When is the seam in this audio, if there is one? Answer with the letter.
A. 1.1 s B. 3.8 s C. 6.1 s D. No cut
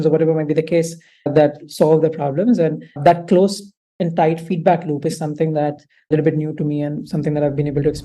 C